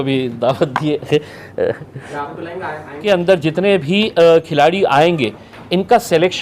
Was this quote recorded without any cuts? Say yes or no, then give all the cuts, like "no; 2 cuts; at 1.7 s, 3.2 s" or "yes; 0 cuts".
no; 1 cut; at 2.9 s